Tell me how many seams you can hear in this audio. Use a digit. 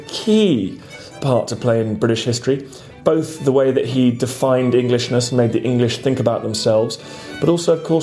1